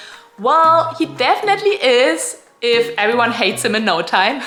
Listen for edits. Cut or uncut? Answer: uncut